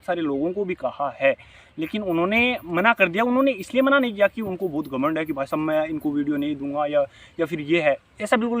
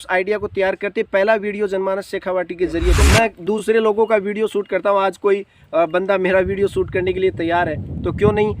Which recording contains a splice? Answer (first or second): second